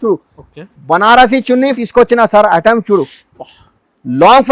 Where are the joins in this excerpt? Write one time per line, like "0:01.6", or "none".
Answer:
0:01.8